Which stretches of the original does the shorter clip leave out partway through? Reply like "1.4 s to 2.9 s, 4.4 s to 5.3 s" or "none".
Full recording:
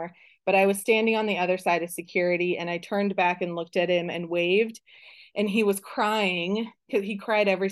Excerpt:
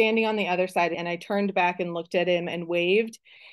1.9 s to 2.6 s